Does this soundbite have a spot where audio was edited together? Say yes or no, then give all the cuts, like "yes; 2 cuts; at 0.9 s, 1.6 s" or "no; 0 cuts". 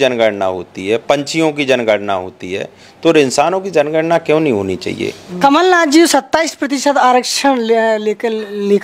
yes; 1 cut; at 5.2 s